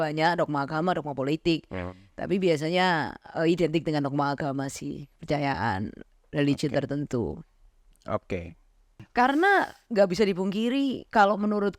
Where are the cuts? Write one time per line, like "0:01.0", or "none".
0:09.0